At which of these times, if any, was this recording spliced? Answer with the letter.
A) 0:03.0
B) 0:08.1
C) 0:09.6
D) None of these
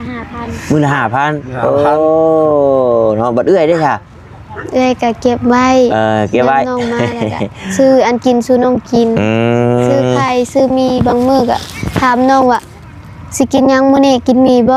D